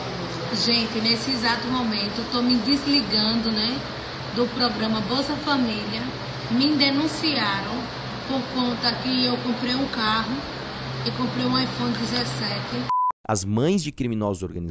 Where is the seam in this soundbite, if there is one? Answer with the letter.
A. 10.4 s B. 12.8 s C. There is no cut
B